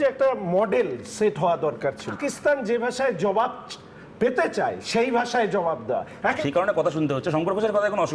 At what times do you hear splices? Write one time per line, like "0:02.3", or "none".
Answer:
0:02.2
0:06.4